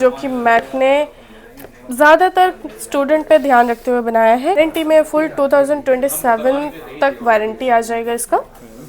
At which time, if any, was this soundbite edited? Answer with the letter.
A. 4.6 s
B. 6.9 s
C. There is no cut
A